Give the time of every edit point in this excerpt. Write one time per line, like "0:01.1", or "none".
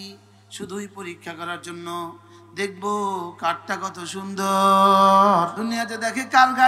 0:05.6